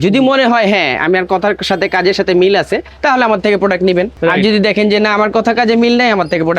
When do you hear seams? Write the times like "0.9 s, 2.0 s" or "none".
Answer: 2.9 s, 4.1 s